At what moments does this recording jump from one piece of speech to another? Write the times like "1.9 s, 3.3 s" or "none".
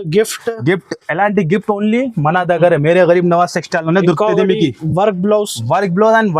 none